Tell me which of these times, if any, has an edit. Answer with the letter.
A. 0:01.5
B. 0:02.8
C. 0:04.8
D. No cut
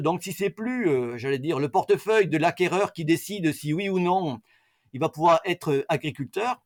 D